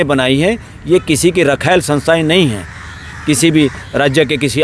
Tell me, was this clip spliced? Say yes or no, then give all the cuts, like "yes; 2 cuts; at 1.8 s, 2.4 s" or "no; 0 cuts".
no; 0 cuts